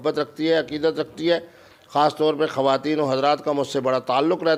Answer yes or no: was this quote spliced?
no